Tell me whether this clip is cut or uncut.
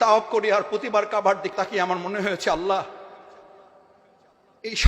cut